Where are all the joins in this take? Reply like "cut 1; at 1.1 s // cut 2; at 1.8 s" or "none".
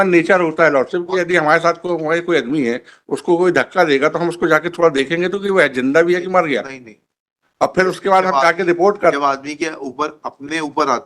none